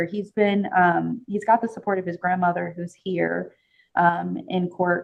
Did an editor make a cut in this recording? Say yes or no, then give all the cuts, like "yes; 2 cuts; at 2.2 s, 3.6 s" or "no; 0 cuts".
no; 0 cuts